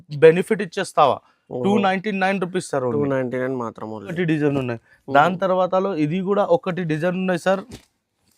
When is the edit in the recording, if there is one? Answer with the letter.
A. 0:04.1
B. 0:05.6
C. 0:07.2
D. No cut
A